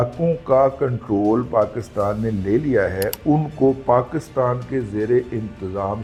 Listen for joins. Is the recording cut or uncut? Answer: uncut